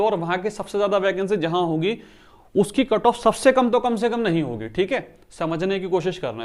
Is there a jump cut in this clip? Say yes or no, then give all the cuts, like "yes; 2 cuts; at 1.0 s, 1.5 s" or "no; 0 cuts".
no; 0 cuts